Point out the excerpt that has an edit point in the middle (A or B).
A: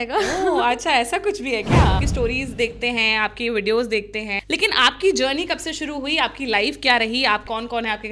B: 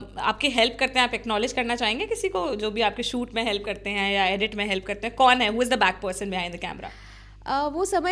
A